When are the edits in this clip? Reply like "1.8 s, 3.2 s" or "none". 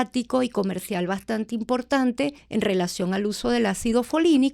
2.4 s